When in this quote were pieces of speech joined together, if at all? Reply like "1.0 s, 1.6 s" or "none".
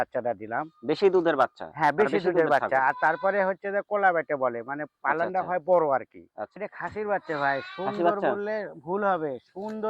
6.6 s